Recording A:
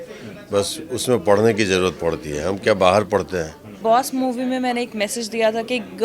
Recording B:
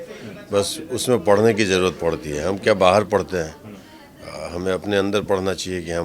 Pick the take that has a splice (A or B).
A